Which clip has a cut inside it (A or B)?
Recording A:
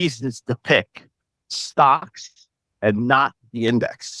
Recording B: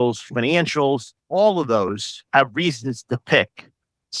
B